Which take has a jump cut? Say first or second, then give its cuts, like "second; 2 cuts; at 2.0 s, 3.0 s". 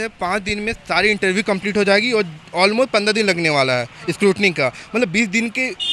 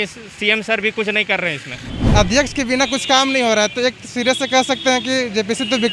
second; 1 cut; at 1.9 s